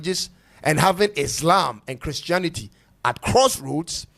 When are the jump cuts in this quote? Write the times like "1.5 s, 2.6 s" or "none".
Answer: none